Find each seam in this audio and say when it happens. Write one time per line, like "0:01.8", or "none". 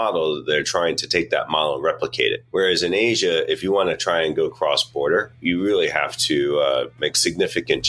0:02.4
0:05.4